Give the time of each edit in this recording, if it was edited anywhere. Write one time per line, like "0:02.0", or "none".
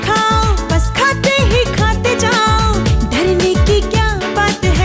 none